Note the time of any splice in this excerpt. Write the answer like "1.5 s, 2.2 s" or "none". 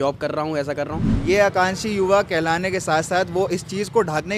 1.1 s